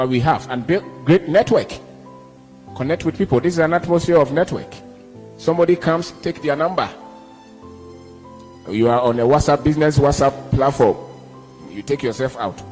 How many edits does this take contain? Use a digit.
2